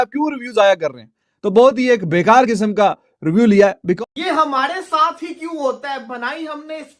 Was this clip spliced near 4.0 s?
yes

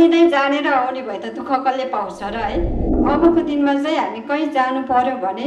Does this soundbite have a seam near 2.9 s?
yes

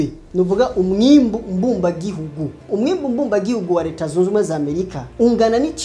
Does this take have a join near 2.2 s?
no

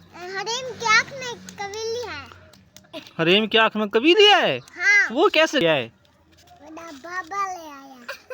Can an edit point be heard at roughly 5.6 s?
yes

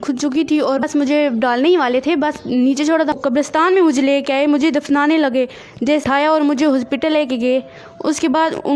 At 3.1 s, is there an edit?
yes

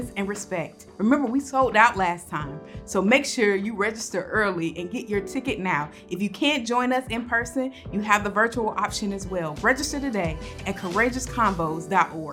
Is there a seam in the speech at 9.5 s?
yes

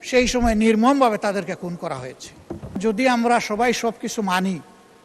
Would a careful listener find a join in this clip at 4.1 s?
no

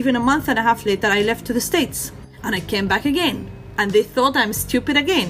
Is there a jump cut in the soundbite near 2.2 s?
yes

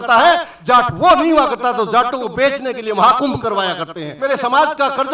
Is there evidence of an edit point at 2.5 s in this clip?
no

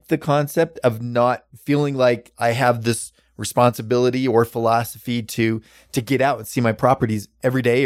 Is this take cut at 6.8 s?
yes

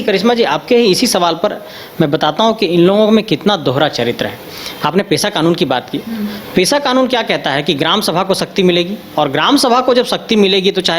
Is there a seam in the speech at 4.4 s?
no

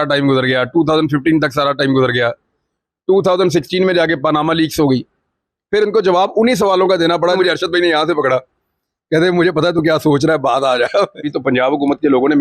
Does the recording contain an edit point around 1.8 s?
no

